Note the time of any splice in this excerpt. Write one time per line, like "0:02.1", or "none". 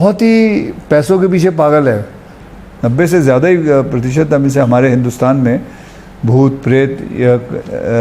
0:02.4